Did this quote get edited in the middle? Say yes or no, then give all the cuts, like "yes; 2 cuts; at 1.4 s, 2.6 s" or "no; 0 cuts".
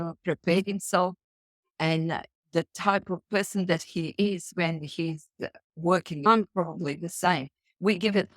yes; 1 cut; at 6.3 s